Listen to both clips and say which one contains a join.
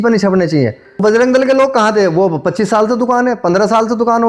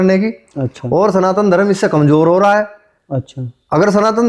first; 1 cut; at 1.0 s

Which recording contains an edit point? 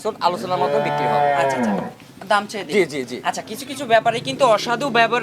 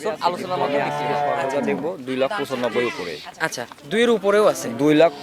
second; 1 cut; at 1.5 s

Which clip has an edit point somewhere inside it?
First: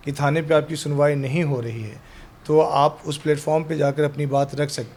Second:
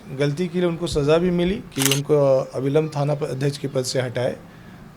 second; 1 cut; at 1.7 s

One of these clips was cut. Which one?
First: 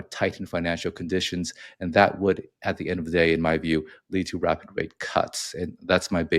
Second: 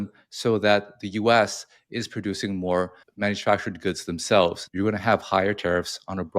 second; 2 cuts; at 3.0 s, 4.6 s

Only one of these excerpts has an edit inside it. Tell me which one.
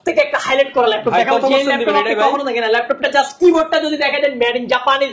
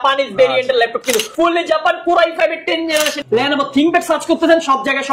second; 2 cuts; at 1.3 s, 3.2 s

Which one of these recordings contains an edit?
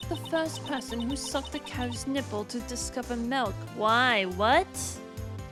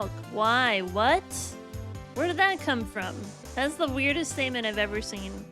second; 1 cut; at 3.4 s

